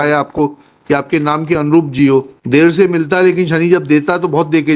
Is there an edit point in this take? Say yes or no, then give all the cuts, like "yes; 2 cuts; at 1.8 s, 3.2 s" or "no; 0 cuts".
yes; 1 cut; at 2.4 s